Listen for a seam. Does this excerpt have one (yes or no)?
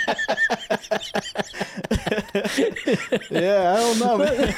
no